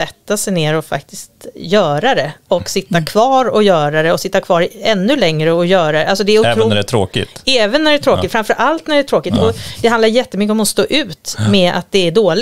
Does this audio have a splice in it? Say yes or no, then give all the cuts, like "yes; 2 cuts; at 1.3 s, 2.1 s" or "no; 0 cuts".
no; 0 cuts